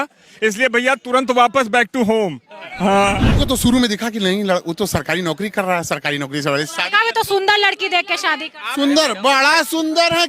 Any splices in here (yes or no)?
yes